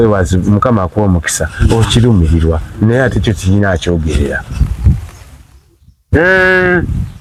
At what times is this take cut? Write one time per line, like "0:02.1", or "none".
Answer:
none